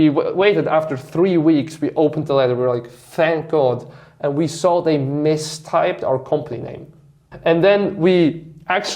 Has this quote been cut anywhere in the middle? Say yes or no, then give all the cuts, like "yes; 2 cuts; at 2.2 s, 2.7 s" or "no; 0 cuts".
yes; 1 cut; at 7.2 s